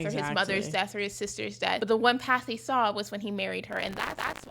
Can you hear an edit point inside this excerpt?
yes; 1 cut; at 1.8 s

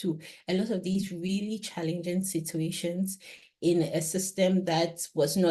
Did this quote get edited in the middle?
no; 0 cuts

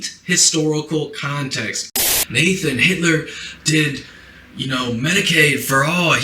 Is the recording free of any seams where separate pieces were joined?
no; 1 cut; at 1.9 s

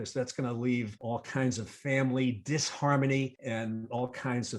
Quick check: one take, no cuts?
no; 2 cuts; at 1.0 s, 3.4 s

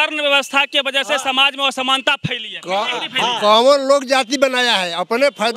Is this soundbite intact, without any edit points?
yes; 0 cuts

